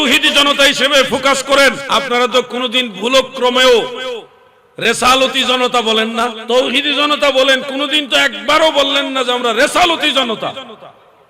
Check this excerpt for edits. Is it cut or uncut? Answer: cut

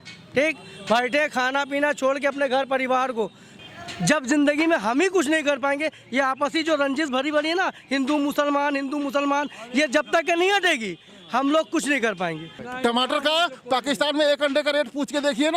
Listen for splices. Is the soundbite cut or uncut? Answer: cut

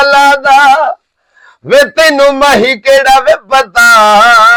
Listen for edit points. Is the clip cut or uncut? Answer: uncut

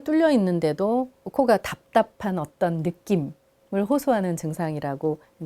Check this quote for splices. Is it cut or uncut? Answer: cut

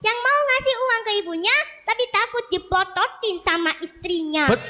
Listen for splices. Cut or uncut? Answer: uncut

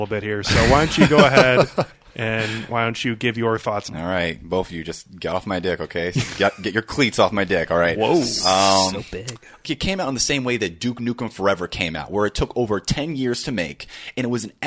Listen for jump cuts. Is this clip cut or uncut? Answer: cut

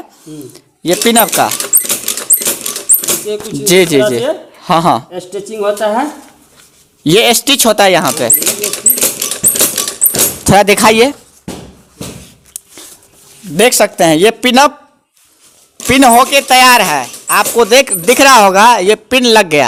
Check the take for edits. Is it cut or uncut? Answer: uncut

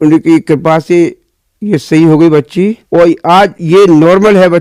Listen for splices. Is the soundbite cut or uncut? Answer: uncut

